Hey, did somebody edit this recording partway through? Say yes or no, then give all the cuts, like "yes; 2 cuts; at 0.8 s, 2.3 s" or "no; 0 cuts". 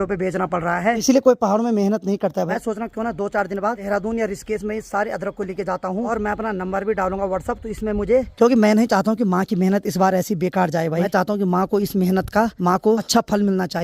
yes; 7 cuts; at 1.0 s, 2.5 s, 3.8 s, 6.1 s, 8.3 s, 11.1 s, 12.7 s